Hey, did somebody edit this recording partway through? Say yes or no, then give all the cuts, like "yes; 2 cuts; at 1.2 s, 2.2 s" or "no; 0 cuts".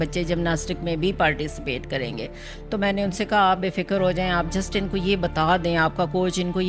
no; 0 cuts